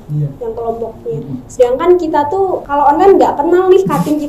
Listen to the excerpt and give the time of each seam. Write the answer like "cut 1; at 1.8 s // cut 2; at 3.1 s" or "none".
cut 1; at 2.6 s